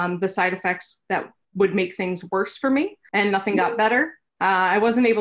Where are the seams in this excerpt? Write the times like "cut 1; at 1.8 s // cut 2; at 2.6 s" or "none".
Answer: cut 1; at 1.4 s // cut 2; at 3.0 s // cut 3; at 4.2 s